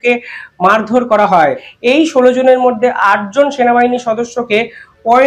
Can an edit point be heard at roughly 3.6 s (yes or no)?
no